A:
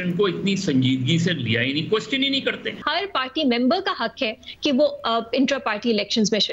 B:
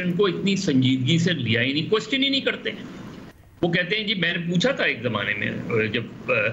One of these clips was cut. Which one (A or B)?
A